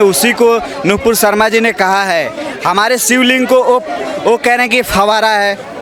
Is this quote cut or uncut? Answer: uncut